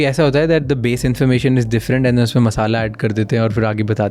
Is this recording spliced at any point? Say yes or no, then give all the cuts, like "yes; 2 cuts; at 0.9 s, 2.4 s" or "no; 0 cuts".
no; 0 cuts